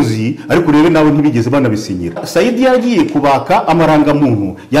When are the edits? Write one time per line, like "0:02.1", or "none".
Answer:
0:02.2